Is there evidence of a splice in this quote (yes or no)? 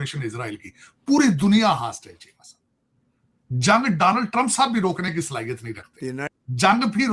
no